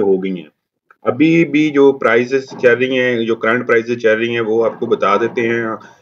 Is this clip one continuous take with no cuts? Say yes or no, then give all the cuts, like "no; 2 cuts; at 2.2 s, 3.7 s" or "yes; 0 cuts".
yes; 0 cuts